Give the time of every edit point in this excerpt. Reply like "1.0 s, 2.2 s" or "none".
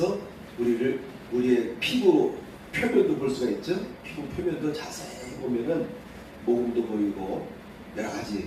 none